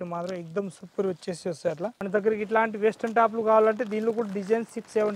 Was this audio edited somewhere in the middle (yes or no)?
yes